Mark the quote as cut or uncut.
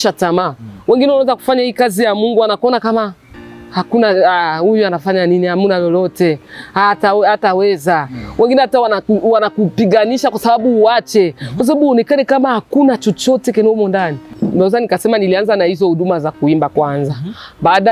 cut